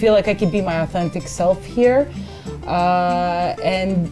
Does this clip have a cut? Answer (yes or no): no